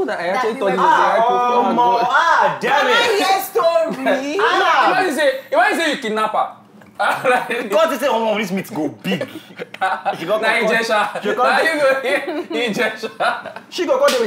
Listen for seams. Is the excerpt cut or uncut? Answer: uncut